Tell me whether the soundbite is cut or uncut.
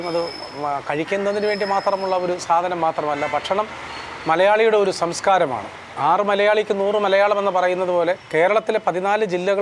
uncut